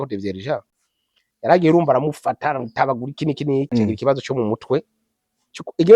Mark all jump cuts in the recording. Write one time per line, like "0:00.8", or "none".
0:03.7